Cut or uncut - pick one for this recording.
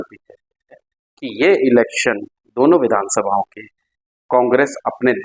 cut